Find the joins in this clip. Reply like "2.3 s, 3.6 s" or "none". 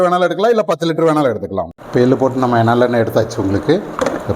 1.8 s